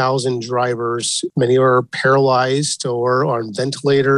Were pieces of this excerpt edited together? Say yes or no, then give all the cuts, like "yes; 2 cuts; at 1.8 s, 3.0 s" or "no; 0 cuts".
yes; 1 cut; at 1.2 s